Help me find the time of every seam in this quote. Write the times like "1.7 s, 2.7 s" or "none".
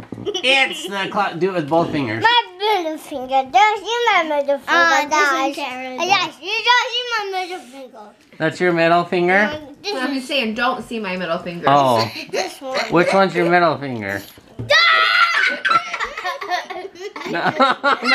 none